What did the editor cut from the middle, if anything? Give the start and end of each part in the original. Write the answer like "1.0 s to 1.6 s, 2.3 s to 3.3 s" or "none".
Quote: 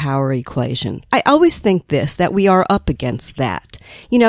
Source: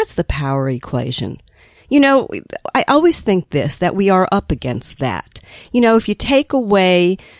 1.3 s to 2.6 s